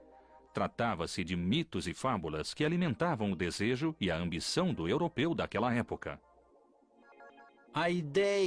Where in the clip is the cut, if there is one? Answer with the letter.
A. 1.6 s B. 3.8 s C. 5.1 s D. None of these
A